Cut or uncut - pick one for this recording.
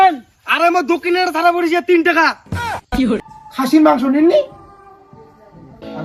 cut